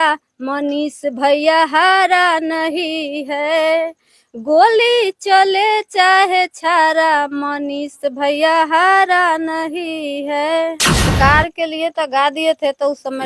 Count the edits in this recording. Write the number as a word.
one